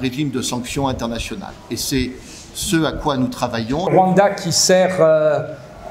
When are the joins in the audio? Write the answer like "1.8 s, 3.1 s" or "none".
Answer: 3.9 s